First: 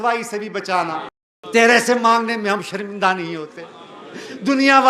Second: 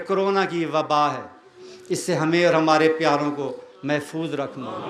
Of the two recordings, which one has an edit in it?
first; 1 cut; at 1.2 s

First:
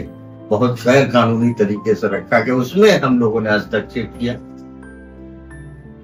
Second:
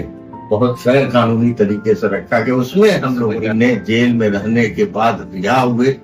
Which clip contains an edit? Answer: second; 1 cut; at 3.4 s

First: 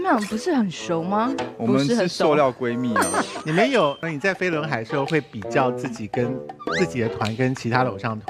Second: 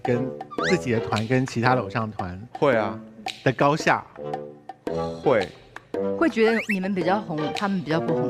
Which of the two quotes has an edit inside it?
first; 1 cut; at 4.1 s

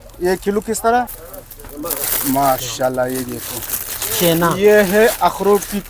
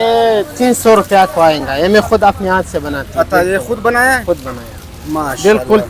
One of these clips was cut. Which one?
first; 1 cut; at 1.2 s

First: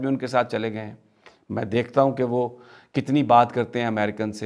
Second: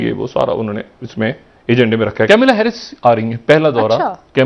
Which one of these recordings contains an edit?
second; 1 cut; at 2.3 s

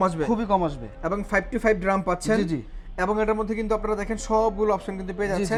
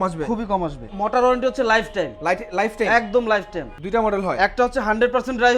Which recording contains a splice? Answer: second; 2 cuts; at 0.9 s, 3.7 s

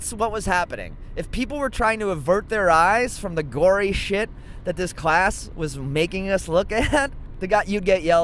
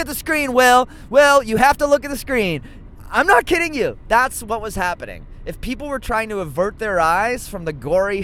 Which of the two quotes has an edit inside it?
first; 1 cut; at 7.3 s

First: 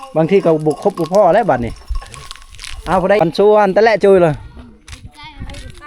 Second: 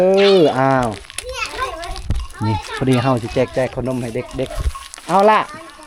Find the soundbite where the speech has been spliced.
first; 1 cut; at 3.2 s

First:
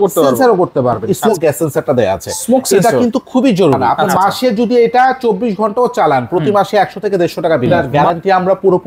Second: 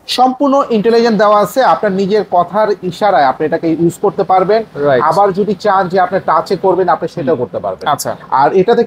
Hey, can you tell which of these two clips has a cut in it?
first; 3 cuts; at 1.2 s, 4.1 s, 7.9 s

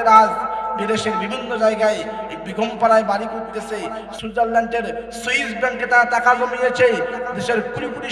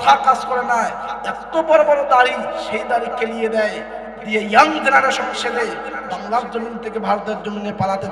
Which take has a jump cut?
first; 1 cut; at 4.2 s

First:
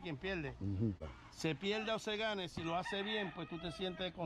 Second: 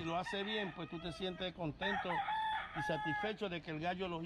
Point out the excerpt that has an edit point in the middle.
first; 1 cut; at 1.1 s

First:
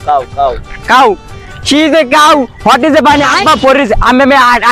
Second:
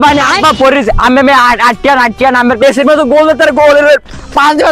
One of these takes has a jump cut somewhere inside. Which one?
second; 1 cut; at 2.6 s

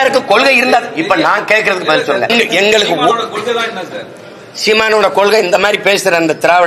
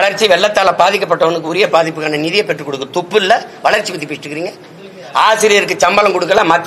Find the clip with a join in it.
first; 1 cut; at 2.3 s

